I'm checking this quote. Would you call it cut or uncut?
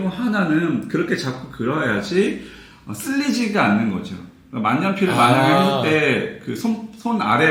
uncut